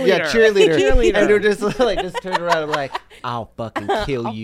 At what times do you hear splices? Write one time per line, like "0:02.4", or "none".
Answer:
0:03.2